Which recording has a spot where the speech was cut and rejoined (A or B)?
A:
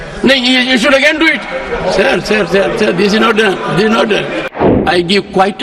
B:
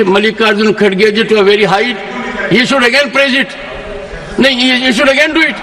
A